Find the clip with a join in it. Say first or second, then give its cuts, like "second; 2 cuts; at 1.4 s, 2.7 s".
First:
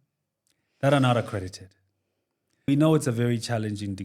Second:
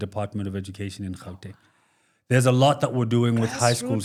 first; 1 cut; at 2.7 s